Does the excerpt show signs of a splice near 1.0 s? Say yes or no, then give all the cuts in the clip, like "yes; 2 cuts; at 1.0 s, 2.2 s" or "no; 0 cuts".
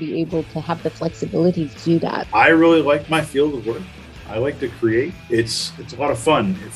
no; 2 cuts; at 2.2 s, 5.2 s